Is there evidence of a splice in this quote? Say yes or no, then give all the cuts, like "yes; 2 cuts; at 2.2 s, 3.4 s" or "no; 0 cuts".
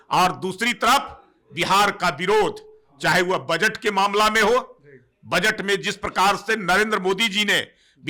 no; 0 cuts